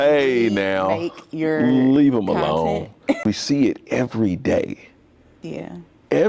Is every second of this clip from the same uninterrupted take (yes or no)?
no